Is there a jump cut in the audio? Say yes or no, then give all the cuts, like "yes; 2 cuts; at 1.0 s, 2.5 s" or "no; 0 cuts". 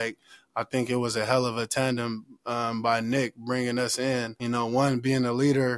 yes; 1 cut; at 4.3 s